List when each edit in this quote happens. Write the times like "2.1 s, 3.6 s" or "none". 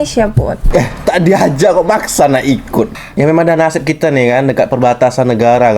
3.0 s